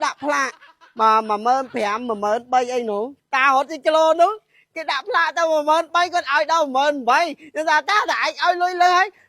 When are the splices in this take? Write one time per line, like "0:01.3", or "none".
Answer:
0:03.2